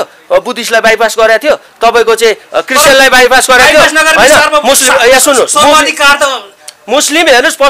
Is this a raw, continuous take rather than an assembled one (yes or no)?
yes